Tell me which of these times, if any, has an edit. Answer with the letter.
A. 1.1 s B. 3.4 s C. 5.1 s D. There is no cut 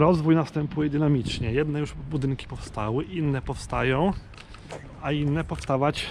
D